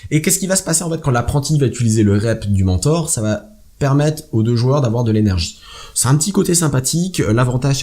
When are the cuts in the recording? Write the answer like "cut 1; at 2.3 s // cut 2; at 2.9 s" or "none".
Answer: cut 1; at 4.4 s